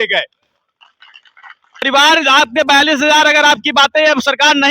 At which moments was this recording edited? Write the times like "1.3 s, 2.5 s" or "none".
1.8 s